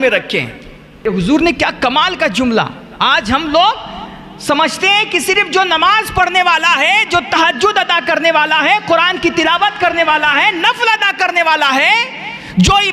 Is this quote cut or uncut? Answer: cut